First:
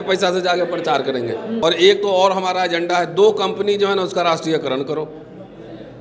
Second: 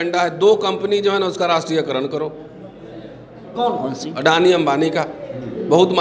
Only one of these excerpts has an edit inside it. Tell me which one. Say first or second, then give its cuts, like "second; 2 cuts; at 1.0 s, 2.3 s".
first; 1 cut; at 1.6 s